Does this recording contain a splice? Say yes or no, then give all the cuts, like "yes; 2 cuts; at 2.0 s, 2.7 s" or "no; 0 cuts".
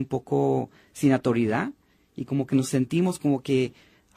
yes; 1 cut; at 0.9 s